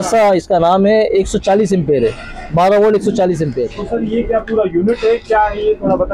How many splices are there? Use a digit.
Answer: 1